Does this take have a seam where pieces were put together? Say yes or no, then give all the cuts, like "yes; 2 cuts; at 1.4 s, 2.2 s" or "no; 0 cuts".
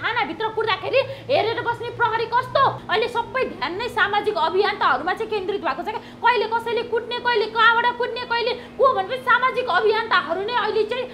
yes; 1 cut; at 2.8 s